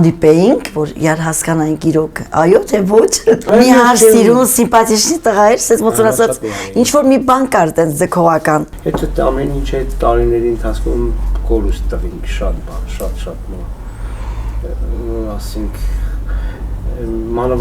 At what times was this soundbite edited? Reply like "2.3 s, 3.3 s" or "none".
3.5 s, 8.8 s